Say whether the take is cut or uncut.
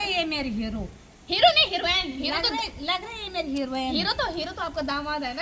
uncut